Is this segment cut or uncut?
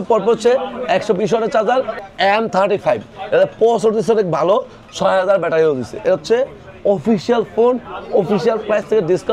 cut